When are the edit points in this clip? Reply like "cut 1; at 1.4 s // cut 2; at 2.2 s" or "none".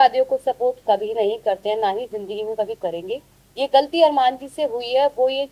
none